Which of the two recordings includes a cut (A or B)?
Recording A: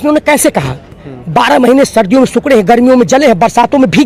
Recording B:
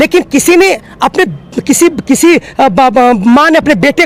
A